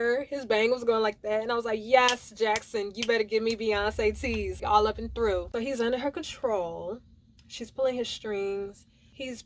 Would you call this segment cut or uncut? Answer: uncut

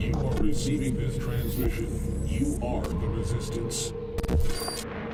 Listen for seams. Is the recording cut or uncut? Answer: uncut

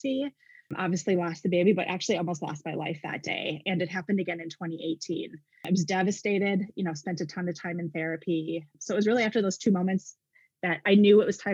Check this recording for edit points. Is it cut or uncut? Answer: cut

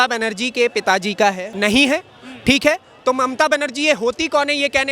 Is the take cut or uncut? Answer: cut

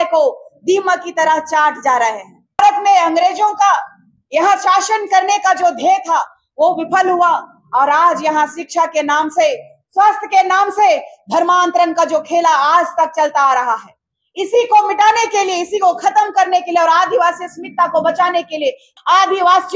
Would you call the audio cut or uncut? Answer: cut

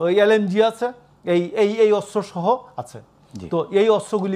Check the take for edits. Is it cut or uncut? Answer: uncut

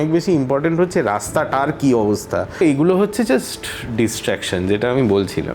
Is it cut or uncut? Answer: cut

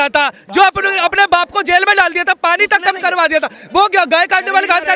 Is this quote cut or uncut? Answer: uncut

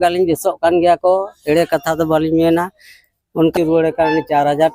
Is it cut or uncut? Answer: cut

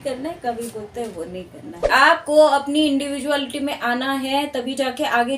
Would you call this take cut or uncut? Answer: cut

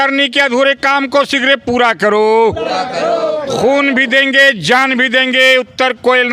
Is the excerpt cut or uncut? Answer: uncut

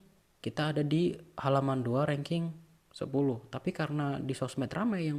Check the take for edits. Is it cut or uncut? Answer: uncut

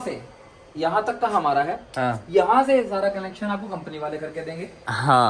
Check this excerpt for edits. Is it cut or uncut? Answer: uncut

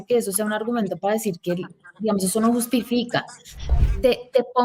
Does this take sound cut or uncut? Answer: cut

